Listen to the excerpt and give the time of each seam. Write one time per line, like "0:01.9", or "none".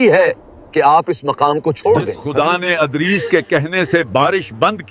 0:02.2